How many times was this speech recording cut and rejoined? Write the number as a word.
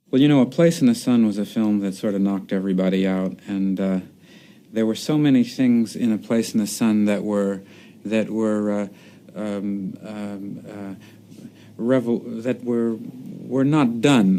zero